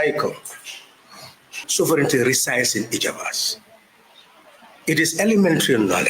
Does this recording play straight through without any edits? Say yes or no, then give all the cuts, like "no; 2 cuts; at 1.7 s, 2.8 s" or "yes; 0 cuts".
no; 1 cut; at 1.6 s